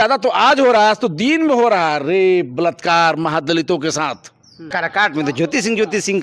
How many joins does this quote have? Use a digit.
1